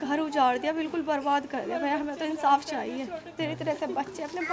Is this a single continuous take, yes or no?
yes